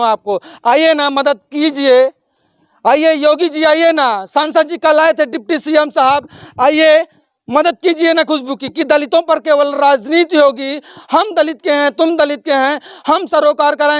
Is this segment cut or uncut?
uncut